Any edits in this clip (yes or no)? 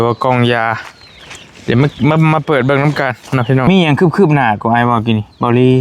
yes